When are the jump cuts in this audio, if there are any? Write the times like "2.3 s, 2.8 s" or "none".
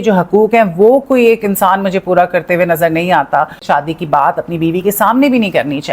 3.6 s